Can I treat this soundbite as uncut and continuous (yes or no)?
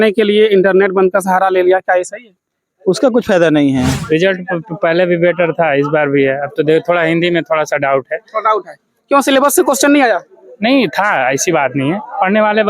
no